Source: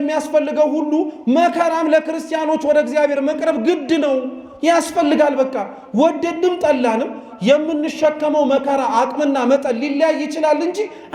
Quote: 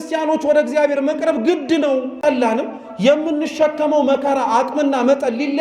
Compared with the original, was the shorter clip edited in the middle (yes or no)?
yes